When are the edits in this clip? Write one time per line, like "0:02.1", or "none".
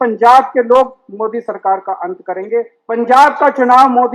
0:02.8

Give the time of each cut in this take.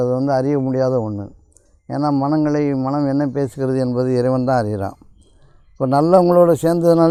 none

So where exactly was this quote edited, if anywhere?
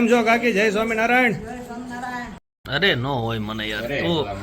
0:02.4

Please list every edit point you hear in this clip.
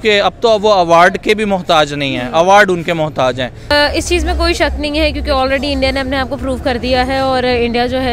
0:03.7

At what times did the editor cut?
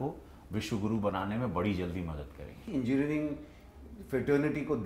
0:02.7

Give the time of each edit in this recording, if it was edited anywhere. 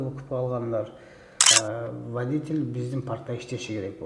0:01.5

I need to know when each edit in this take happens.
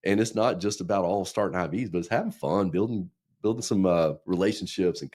none

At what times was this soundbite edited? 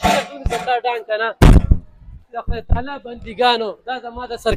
none

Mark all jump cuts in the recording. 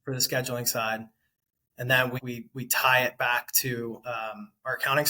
0:02.2

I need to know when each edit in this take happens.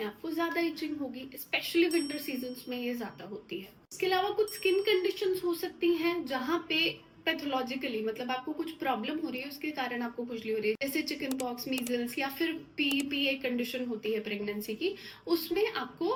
none

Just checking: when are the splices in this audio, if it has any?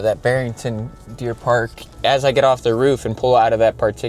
0:02.0

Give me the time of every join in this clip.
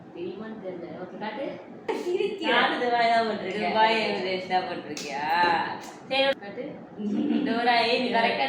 0:06.3

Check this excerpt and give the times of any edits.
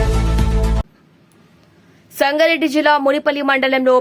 0:01.0

